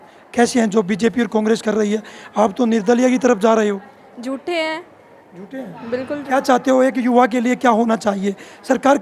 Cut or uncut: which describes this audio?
uncut